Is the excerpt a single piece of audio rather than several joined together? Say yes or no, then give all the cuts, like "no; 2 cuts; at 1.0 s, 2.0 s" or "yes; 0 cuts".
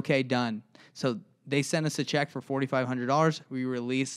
yes; 0 cuts